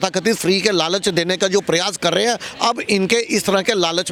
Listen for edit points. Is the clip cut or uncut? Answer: uncut